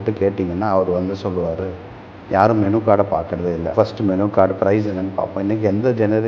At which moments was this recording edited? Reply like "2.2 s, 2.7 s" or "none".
3.7 s